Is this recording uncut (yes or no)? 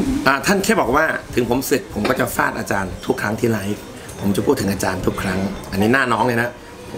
yes